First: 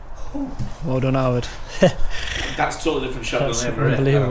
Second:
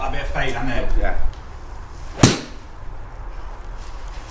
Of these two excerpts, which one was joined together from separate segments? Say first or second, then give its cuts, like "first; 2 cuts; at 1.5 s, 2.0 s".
second; 1 cut; at 1.3 s